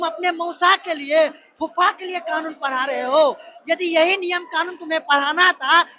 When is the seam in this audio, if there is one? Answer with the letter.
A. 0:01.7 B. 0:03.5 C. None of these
C